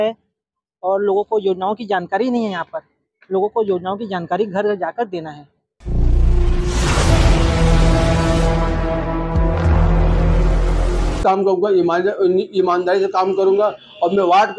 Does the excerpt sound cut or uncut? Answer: cut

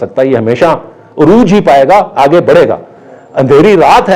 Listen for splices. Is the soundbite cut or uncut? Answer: uncut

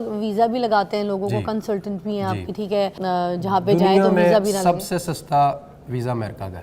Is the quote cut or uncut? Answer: cut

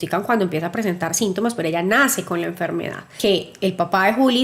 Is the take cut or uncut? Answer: cut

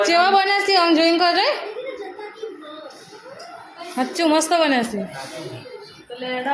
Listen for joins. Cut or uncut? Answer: uncut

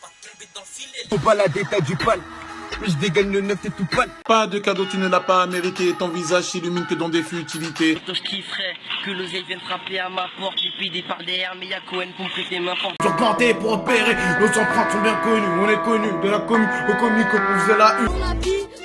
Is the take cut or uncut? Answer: cut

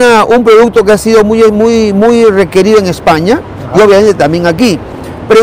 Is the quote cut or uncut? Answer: uncut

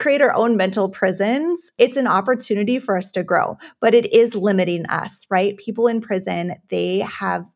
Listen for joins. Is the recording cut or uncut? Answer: cut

